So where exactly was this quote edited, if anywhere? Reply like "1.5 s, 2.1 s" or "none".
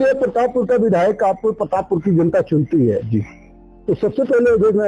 none